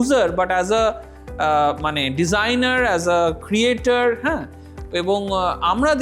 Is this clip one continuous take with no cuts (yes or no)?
yes